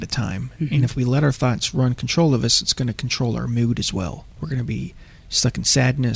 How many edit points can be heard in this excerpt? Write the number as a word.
one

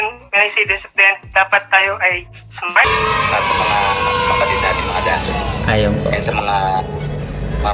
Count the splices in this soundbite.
one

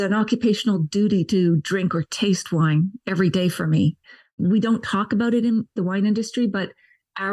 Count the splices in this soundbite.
two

